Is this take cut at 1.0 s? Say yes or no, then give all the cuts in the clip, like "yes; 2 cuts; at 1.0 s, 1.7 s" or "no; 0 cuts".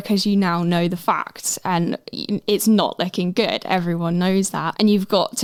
no; 0 cuts